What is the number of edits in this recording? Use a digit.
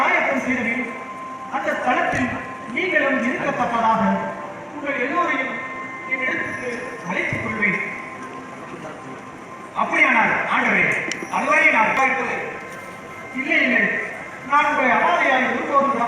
1